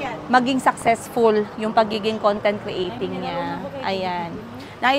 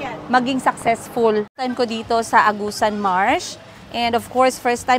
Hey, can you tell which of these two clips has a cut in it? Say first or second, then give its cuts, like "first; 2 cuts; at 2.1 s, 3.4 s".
second; 1 cut; at 1.6 s